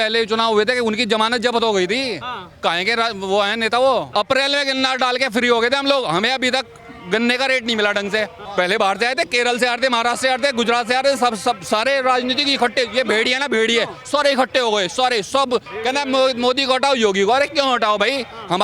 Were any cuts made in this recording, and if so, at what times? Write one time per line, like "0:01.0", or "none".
0:04.1
0:08.4
0:15.7